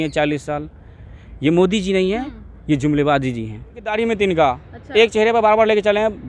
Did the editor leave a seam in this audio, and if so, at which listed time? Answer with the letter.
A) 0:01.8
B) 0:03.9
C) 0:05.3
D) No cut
B